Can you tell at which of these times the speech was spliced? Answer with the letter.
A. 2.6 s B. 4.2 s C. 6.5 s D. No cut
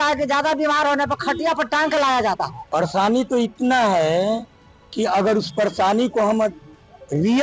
A